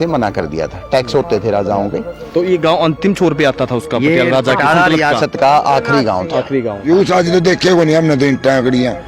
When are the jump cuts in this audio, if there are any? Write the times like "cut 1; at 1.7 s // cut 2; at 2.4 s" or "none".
cut 1; at 6.8 s